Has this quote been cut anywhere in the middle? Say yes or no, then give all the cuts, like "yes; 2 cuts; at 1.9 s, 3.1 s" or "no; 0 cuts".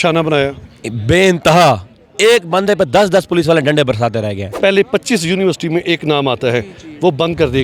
yes; 1 cut; at 4.5 s